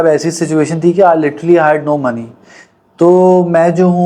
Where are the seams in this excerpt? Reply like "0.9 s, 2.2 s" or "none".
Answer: none